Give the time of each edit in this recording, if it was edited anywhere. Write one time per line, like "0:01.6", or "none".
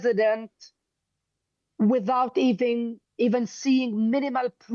none